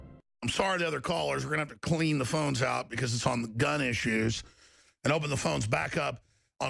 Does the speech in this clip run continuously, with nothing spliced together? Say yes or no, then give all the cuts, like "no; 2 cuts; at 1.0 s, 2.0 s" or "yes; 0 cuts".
no; 1 cut; at 3.5 s